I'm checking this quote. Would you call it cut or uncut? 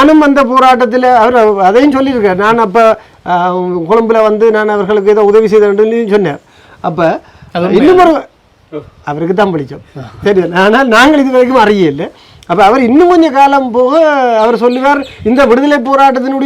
uncut